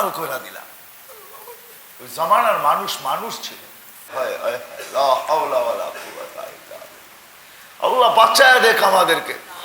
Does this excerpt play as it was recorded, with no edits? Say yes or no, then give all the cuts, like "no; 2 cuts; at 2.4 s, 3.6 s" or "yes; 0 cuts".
no; 1 cut; at 4.1 s